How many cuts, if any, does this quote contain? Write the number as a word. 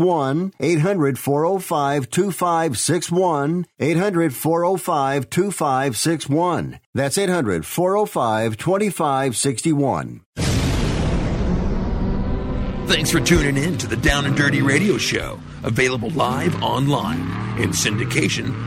one